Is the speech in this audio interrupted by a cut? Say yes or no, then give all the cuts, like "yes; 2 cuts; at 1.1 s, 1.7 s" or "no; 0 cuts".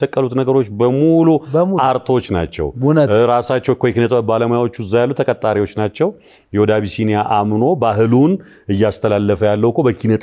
no; 0 cuts